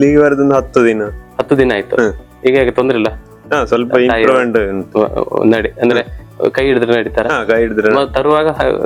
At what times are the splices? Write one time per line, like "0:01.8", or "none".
none